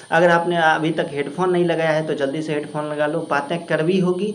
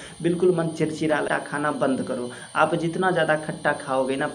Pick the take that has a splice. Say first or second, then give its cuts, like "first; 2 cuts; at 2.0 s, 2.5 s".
second; 1 cut; at 1.2 s